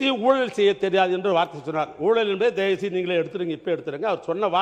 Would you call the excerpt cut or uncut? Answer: uncut